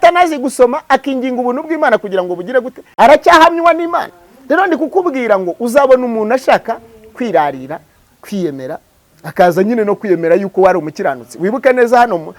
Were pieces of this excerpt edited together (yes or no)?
yes